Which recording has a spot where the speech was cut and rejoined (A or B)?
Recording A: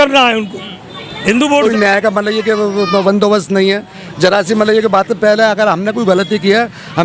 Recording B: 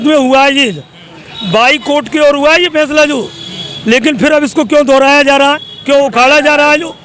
A